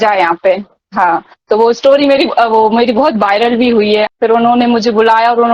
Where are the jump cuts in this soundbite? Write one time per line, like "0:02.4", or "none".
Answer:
0:04.1